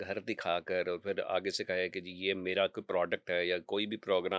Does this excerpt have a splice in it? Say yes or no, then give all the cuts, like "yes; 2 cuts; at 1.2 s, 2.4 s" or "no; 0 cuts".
no; 0 cuts